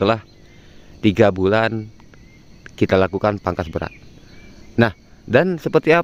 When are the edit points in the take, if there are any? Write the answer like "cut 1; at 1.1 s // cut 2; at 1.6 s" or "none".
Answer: none